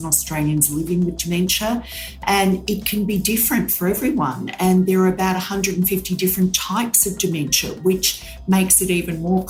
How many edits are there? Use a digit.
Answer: 0